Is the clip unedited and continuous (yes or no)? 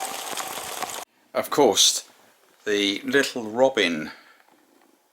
no